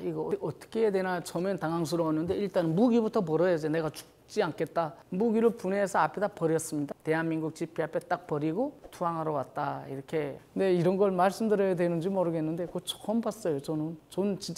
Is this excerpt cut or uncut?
cut